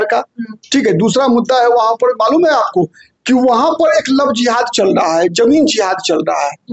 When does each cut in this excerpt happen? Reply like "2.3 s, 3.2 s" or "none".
none